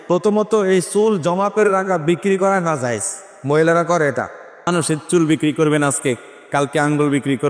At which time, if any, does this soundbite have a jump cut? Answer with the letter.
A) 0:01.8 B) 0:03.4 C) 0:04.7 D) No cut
C